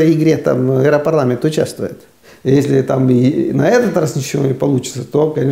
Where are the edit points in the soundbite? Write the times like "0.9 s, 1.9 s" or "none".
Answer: 2.2 s